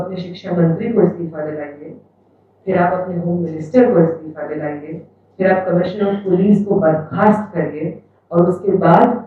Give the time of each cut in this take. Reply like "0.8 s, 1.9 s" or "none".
none